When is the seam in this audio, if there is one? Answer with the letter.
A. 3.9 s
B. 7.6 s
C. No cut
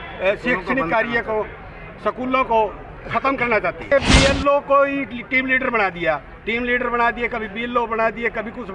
A